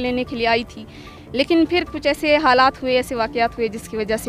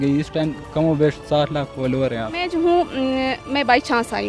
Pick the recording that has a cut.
second; 1 cut; at 2.5 s

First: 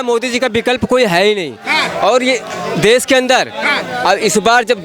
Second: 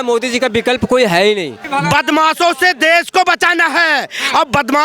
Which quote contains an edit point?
second; 1 cut; at 1.5 s

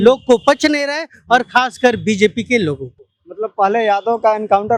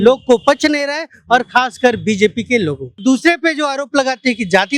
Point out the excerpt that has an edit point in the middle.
second; 1 cut; at 3.0 s

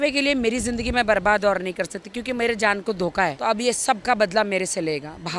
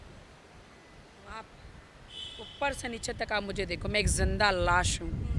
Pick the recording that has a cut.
first; 1 cut; at 3.4 s

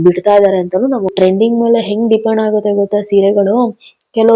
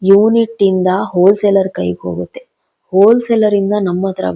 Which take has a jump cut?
first; 1 cut; at 1.1 s

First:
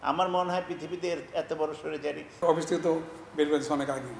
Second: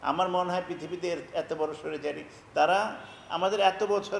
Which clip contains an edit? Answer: first; 1 cut; at 2.4 s

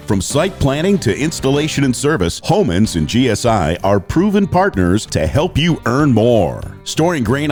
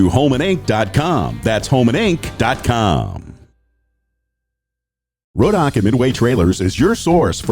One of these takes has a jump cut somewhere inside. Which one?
second; 1 cut; at 4.7 s

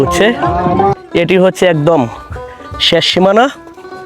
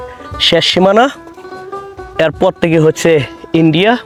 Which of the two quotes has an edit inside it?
first; 1 cut; at 0.9 s

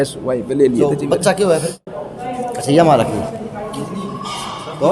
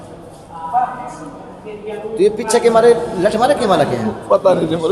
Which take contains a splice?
first; 1 cut; at 1.8 s

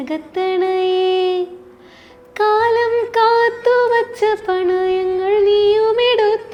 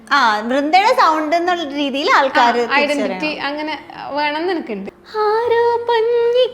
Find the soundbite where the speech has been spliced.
second; 1 cut; at 4.9 s

